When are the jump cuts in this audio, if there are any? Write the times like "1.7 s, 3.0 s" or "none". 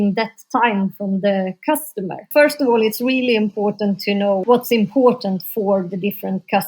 2.2 s, 4.4 s